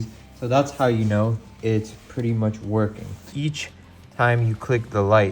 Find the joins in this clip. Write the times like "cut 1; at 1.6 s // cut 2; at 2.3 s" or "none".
cut 1; at 3.3 s